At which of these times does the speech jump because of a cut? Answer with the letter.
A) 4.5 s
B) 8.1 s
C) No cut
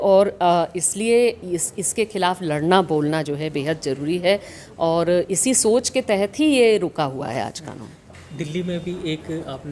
C